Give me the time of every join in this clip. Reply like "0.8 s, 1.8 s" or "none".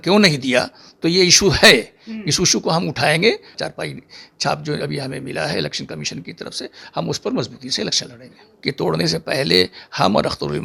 3.5 s, 8.4 s

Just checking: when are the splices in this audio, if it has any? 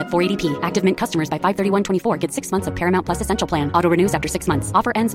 none

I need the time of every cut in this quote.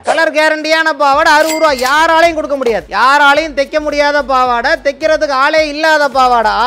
2.9 s

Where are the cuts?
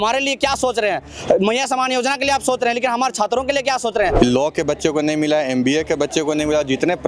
4.1 s

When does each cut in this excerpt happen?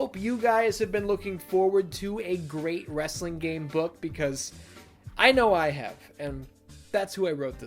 none

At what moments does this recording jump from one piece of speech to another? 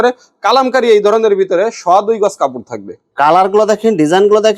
2.9 s

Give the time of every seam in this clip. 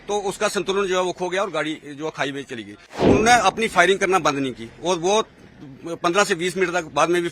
2.9 s

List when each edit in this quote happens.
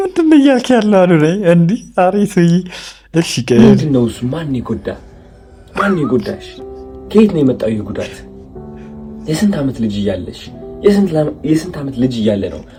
none

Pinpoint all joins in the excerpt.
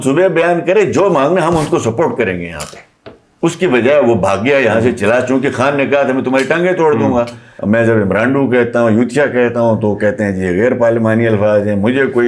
7.5 s

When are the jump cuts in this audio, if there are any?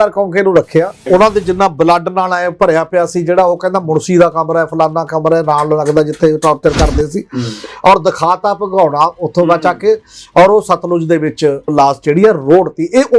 1.1 s, 11.7 s

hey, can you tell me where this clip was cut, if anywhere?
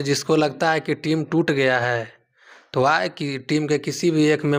none

